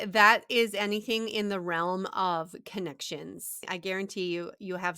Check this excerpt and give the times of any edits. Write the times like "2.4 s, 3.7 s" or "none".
3.7 s